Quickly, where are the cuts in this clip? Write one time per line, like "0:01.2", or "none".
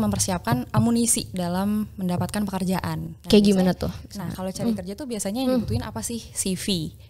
none